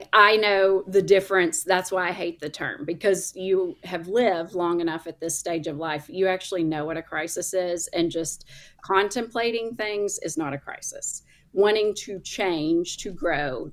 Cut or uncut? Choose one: uncut